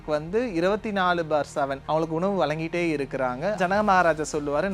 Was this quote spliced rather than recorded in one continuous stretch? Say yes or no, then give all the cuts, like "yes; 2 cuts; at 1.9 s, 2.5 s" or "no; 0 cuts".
yes; 2 cuts; at 1.8 s, 3.6 s